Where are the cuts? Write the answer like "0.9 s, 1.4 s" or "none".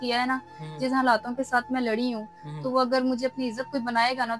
none